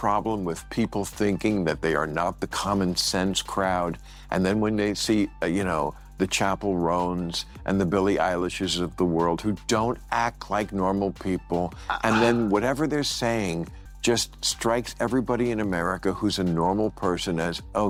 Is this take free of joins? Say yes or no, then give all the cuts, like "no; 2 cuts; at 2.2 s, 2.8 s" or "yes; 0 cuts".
yes; 0 cuts